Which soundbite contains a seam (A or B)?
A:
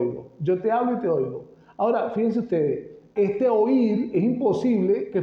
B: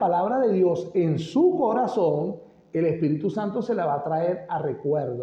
A